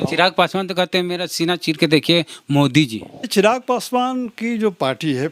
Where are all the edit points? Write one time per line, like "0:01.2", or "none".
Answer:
0:03.3